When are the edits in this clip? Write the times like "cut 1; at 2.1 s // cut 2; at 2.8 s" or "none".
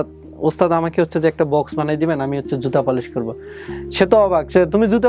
none